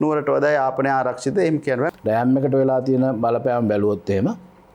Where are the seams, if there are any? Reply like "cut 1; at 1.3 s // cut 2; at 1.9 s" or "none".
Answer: cut 1; at 1.9 s